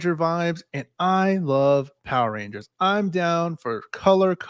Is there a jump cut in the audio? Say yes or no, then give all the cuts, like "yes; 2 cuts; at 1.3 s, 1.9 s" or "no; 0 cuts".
no; 0 cuts